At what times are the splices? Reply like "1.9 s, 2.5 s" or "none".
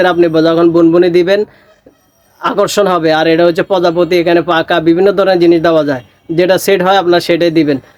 none